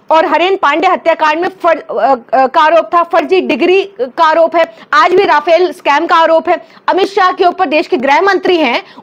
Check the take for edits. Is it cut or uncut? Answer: uncut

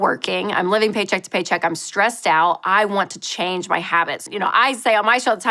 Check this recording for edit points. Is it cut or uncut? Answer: cut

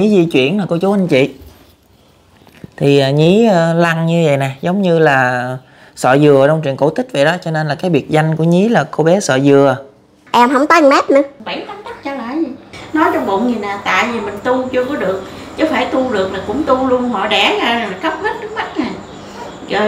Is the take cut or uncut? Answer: cut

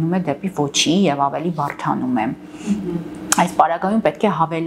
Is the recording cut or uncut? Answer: uncut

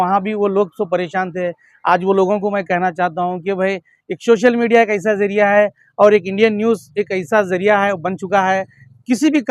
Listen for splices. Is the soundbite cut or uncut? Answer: uncut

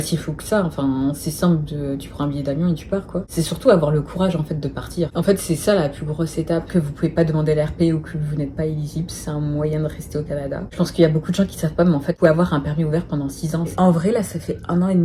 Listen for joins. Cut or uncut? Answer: cut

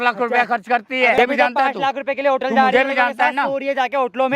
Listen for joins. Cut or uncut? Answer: cut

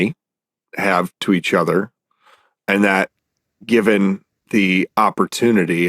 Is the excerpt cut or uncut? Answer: cut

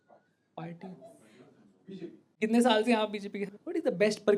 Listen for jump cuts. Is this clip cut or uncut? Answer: cut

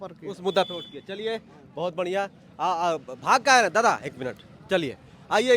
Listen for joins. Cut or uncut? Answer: uncut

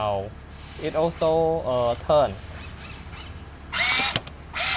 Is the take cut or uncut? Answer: uncut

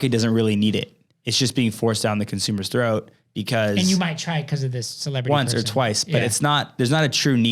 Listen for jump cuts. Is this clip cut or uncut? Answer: uncut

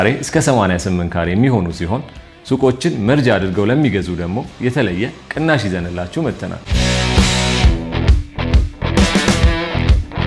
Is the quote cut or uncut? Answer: cut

